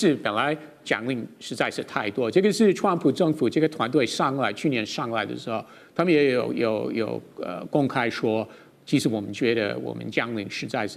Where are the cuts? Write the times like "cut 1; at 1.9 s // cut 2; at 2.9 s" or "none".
none